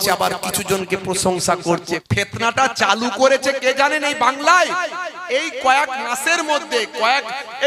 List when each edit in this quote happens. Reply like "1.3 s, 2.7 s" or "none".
2.0 s